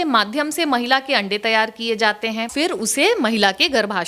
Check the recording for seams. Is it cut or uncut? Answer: cut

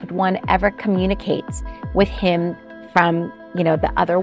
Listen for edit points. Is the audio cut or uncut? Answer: uncut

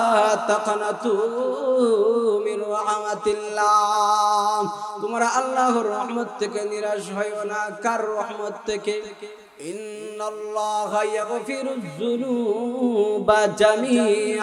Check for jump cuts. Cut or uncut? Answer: cut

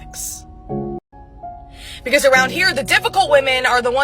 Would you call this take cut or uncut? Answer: cut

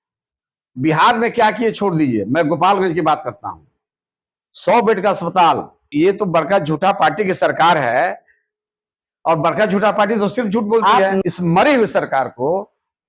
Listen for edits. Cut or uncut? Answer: cut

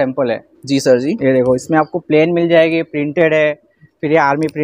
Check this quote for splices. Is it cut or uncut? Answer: uncut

